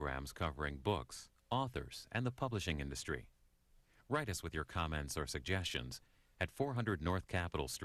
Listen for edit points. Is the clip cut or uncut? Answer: uncut